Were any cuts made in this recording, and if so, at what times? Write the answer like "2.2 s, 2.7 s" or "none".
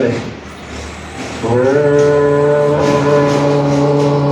none